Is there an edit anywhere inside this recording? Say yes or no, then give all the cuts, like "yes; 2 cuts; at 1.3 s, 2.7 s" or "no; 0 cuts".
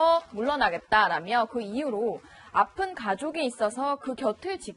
no; 0 cuts